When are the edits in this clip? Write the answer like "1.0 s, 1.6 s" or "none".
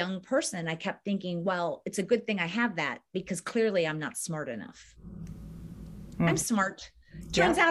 none